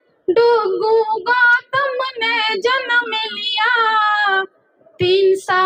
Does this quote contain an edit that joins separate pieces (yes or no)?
no